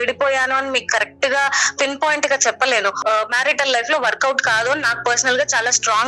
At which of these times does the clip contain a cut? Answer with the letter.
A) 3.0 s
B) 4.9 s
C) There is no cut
A